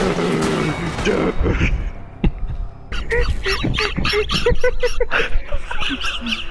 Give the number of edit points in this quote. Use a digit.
1